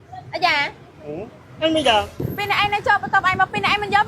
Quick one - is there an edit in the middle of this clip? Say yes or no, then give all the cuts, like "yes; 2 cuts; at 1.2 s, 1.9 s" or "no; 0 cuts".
yes; 1 cut; at 2.2 s